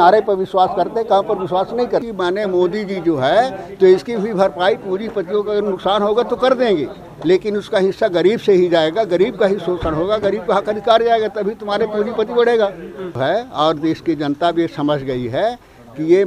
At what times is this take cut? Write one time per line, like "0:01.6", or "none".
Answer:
0:02.1
0:13.2